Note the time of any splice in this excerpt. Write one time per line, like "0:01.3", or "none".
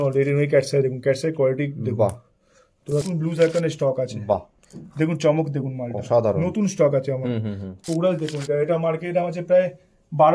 0:03.0
0:07.8